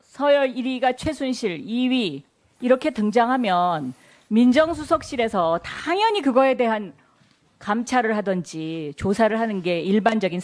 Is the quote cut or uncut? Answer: uncut